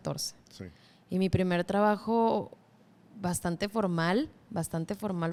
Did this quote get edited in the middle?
no; 0 cuts

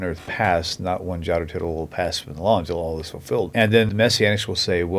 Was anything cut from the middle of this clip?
yes; 1 cut; at 3.7 s

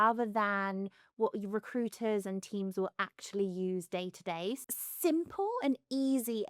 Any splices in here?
yes; 1 cut; at 4.6 s

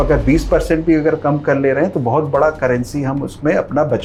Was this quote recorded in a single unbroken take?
yes; 0 cuts

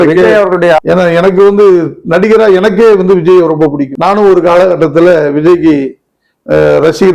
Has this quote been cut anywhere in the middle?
yes; 2 cuts; at 0.8 s, 3.9 s

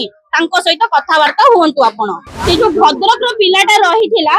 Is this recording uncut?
no; 1 cut; at 2.3 s

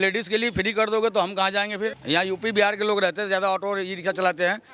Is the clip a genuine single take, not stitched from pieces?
no; 1 cut; at 2.0 s

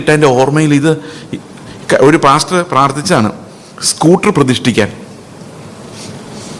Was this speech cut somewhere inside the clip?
no; 0 cuts

